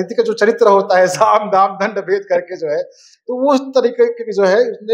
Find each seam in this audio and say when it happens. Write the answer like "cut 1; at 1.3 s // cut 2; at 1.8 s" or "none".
none